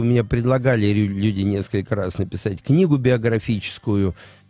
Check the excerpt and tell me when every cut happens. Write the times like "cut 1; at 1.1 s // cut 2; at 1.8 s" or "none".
none